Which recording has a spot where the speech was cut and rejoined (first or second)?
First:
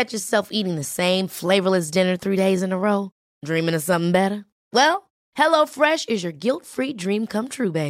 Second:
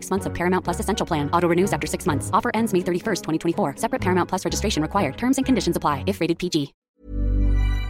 second